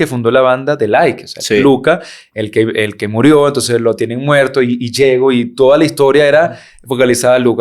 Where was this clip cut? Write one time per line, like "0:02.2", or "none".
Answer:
none